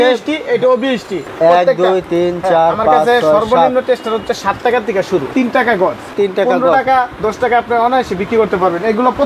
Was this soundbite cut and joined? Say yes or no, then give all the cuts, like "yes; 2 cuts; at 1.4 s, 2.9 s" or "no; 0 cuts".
yes; 2 cuts; at 1.2 s, 5.3 s